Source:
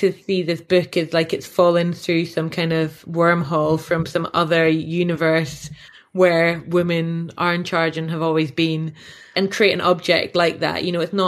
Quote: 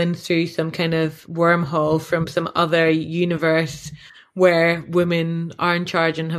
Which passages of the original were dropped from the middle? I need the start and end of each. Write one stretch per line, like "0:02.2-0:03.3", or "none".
none